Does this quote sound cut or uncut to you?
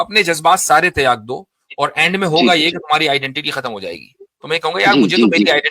uncut